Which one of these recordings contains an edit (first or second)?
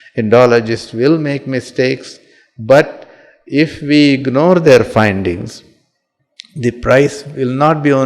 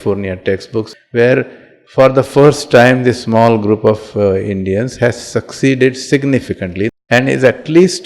second